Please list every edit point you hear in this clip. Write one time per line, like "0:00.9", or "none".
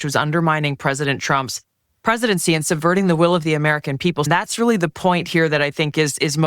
0:04.3